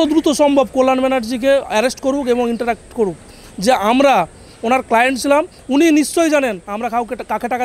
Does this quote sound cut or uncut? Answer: uncut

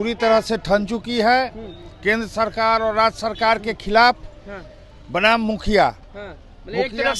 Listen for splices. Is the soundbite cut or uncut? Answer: uncut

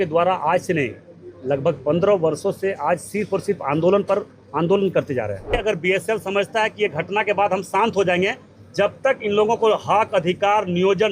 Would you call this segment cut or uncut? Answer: cut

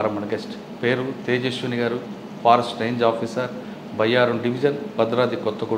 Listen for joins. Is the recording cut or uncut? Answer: uncut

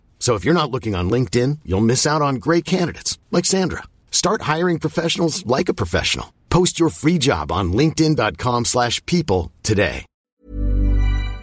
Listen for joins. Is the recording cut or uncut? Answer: cut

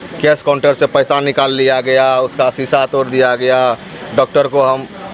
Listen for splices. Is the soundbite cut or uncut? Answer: uncut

